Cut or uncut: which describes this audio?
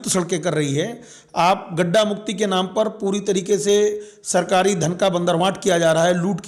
uncut